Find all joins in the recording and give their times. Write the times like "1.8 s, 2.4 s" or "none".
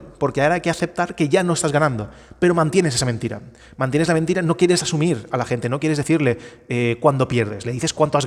none